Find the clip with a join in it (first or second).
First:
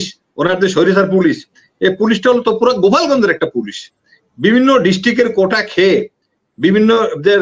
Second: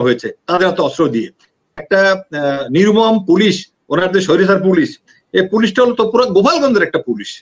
second